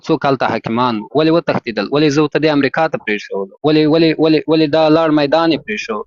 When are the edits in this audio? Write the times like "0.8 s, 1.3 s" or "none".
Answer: none